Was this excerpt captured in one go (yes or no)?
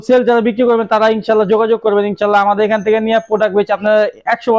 yes